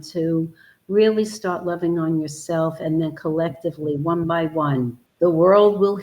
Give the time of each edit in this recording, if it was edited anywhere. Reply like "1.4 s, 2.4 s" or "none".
5.0 s